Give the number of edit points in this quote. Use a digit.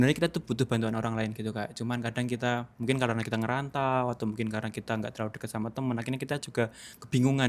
0